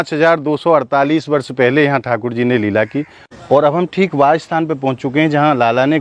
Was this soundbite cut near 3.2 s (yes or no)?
yes